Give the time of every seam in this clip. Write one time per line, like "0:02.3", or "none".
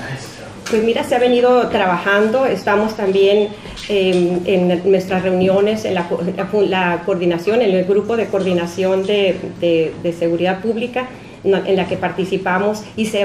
0:04.4